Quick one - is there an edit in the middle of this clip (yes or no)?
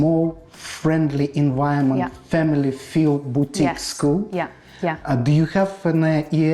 no